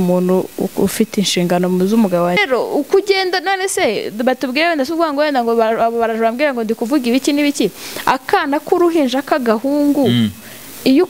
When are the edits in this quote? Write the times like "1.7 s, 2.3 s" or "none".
2.4 s

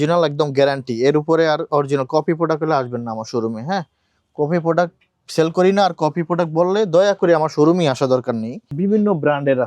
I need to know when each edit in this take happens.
8.8 s

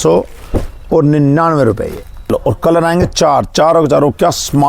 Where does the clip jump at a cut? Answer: 2.3 s

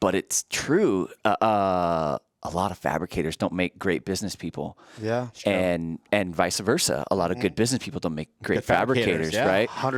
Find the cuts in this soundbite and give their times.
none

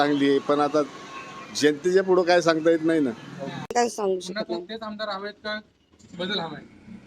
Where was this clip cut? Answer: 3.7 s

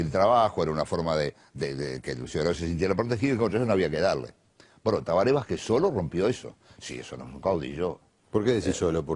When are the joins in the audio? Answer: none

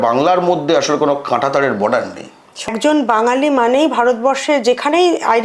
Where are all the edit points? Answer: 2.7 s

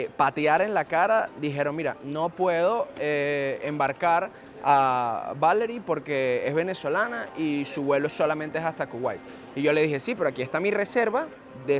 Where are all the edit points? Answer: none

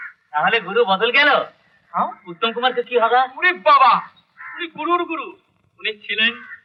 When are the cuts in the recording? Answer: none

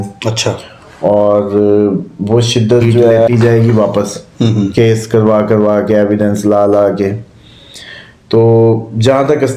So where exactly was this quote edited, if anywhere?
3.3 s

